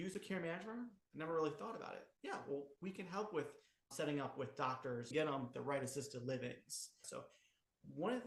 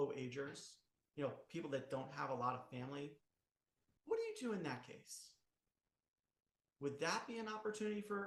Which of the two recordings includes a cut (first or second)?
first